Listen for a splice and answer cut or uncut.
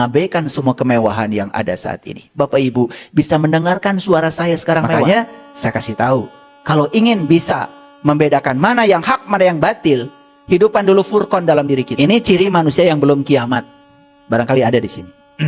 cut